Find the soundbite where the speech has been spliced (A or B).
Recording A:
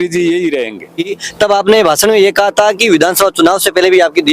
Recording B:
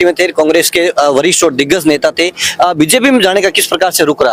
A